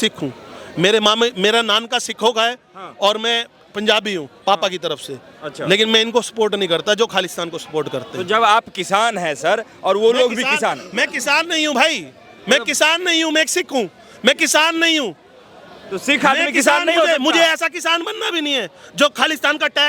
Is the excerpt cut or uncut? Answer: uncut